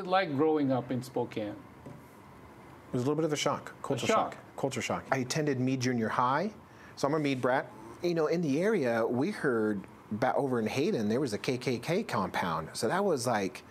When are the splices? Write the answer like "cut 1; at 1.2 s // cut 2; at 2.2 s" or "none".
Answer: cut 1; at 5.0 s // cut 2; at 7.7 s